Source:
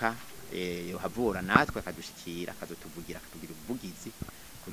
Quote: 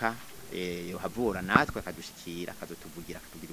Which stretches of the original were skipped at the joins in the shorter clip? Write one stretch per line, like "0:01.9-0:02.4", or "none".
none